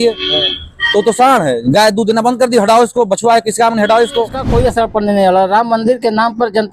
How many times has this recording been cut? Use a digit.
1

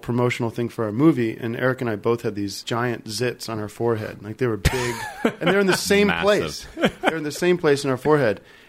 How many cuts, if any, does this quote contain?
1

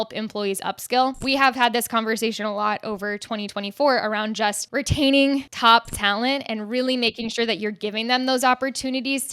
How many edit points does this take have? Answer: 3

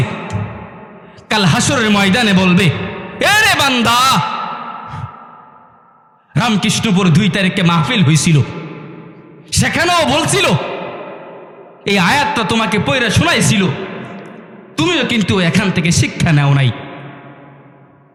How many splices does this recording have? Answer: 0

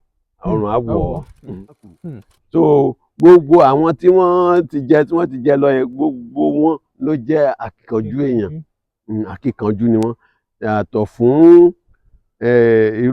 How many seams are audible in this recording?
1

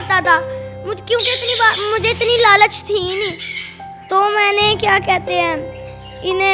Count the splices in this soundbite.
0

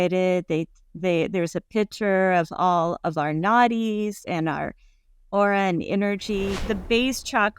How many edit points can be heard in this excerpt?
1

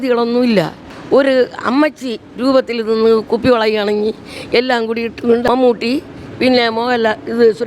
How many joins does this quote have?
2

